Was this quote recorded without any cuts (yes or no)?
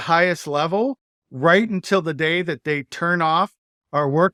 yes